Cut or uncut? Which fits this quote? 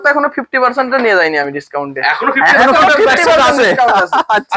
uncut